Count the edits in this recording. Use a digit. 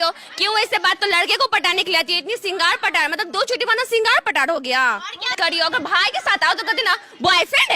2